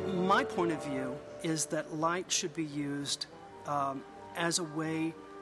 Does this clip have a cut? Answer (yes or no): no